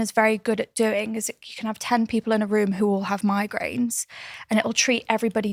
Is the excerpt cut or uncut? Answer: uncut